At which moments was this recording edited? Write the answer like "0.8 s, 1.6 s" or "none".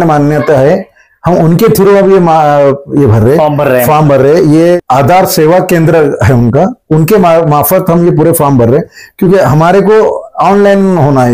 4.8 s